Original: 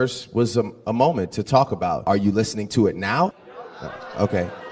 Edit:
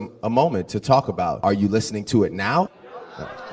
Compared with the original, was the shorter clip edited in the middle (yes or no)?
no